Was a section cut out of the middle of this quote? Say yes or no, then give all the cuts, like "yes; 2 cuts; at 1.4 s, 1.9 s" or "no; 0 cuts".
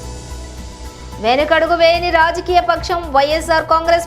yes; 1 cut; at 1.2 s